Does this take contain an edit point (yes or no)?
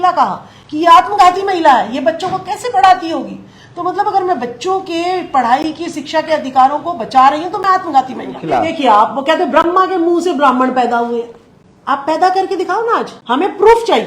yes